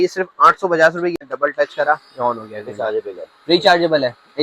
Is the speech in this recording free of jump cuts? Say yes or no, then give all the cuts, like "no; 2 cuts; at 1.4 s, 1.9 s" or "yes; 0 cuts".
no; 1 cut; at 1.2 s